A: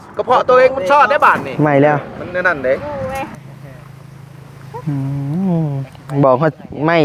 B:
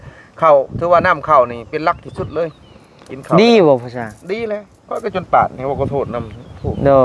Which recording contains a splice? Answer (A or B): A